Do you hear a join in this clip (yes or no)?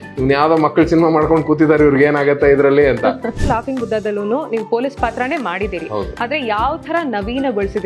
yes